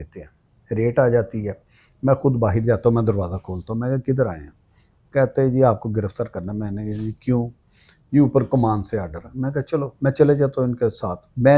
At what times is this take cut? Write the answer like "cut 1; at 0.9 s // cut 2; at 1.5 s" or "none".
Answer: none